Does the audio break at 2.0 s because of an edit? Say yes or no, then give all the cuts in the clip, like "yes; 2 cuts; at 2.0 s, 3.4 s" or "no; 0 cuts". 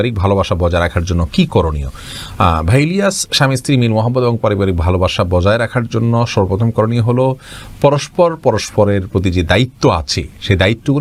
no; 0 cuts